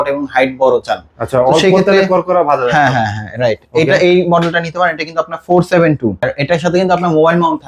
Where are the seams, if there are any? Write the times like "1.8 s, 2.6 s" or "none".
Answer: 6.3 s